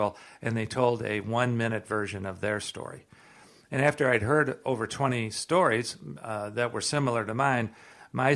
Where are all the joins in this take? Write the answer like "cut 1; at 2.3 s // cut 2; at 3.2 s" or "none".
none